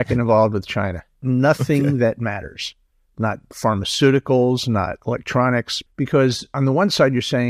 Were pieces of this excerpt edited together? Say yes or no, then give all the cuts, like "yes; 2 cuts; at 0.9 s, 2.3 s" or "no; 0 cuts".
yes; 2 cuts; at 1.3 s, 6.1 s